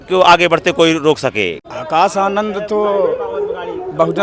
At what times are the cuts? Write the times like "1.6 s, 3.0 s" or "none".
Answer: 1.6 s